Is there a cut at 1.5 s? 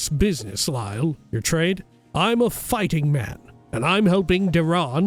yes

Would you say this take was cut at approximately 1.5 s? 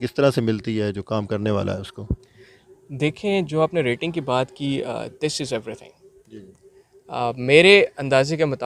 no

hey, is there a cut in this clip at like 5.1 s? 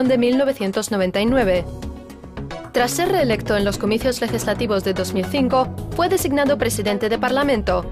no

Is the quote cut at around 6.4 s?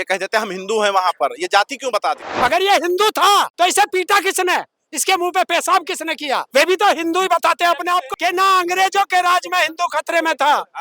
yes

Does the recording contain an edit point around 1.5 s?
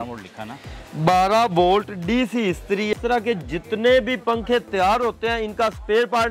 no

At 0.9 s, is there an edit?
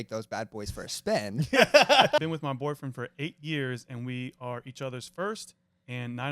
no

